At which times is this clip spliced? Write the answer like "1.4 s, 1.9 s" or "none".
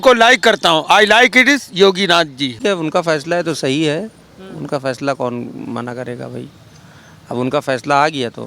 2.6 s